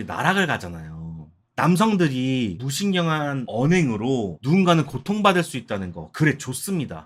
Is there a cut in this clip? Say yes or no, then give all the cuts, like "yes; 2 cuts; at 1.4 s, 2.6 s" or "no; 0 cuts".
no; 0 cuts